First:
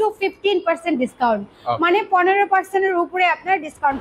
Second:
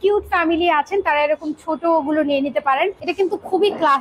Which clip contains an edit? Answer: second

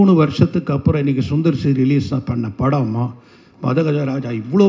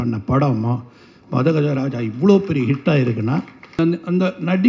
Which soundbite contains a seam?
second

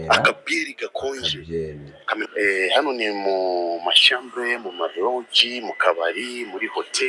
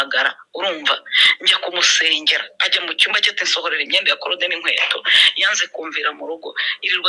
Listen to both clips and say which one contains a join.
first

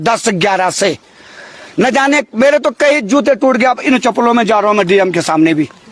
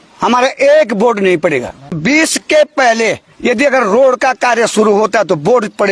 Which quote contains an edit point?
second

